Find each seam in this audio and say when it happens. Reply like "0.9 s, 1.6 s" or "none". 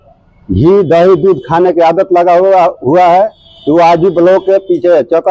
none